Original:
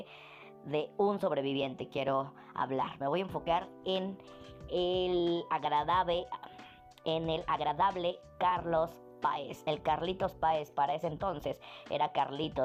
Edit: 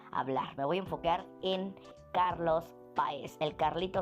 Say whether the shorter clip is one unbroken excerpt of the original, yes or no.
no